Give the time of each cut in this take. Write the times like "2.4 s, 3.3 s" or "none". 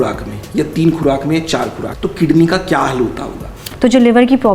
1.8 s, 3.6 s